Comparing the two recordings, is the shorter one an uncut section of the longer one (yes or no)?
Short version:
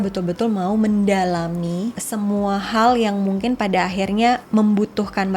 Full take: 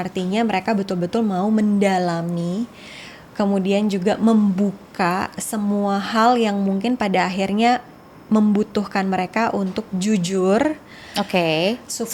no